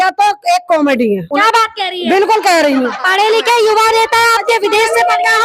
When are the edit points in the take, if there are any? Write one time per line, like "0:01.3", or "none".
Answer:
0:01.2